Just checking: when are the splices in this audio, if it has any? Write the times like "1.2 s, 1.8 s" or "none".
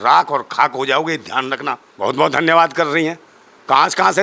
1.8 s